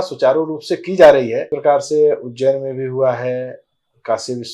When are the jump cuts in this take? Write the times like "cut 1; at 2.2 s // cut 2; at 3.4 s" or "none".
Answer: cut 1; at 1.5 s